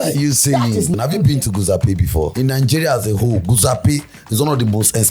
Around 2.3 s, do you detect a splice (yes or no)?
yes